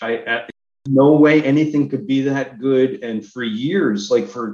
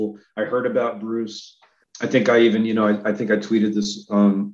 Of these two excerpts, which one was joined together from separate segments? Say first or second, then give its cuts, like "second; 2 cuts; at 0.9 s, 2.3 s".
second; 1 cut; at 1.8 s